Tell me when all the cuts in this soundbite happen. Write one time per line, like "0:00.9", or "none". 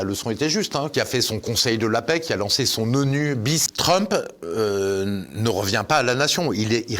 0:00.9
0:03.7